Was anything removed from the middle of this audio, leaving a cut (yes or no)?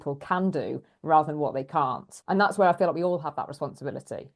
yes